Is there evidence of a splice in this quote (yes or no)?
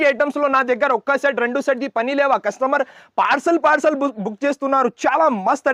no